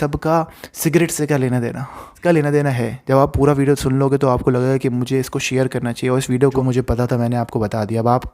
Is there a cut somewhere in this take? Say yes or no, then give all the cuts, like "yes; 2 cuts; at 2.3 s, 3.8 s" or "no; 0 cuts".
yes; 2 cuts; at 2.2 s, 6.4 s